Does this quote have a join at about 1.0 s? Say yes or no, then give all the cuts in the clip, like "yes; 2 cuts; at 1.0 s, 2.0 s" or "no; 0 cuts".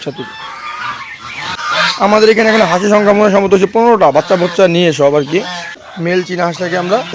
no; 1 cut; at 5.9 s